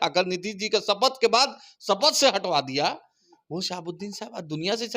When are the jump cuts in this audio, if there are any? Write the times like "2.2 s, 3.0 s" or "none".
none